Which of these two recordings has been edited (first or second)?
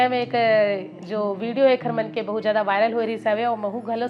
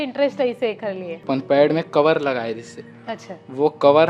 second